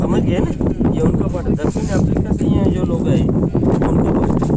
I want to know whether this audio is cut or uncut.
uncut